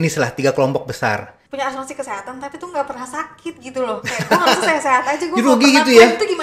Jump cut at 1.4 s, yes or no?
yes